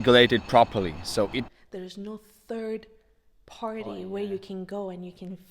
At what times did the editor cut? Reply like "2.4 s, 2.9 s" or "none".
1.5 s